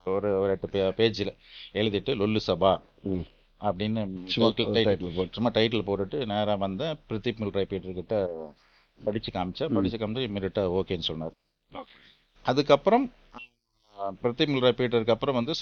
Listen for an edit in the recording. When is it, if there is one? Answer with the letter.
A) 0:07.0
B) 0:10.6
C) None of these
C